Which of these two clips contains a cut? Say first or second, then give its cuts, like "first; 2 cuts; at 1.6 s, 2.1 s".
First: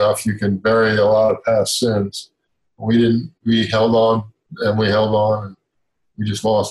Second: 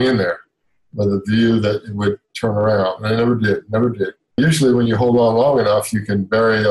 second; 1 cut; at 4.4 s